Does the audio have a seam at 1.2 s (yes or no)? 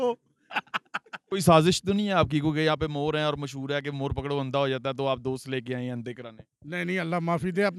yes